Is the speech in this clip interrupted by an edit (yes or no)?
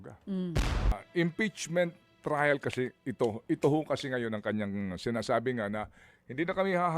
yes